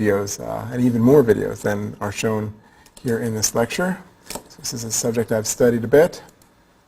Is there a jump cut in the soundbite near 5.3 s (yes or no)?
no